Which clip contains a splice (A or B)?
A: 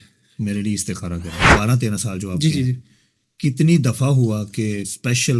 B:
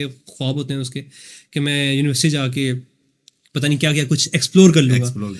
A